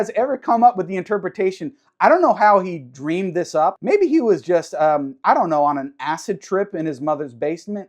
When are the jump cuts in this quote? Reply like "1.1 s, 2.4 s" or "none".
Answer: 3.8 s